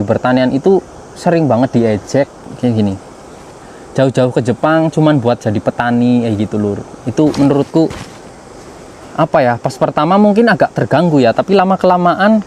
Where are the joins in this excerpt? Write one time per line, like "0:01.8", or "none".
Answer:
none